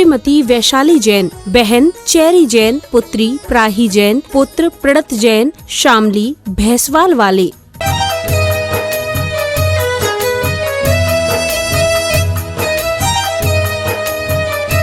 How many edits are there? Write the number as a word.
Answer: two